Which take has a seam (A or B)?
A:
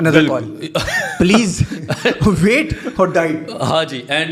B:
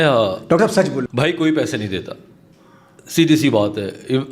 B